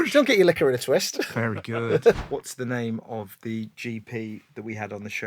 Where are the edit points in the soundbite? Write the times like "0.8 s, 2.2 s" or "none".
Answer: 1.2 s, 2.2 s